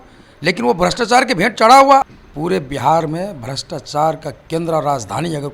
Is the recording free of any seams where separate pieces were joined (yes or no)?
no